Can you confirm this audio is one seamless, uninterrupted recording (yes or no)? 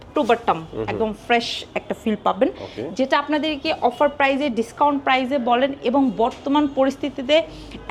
yes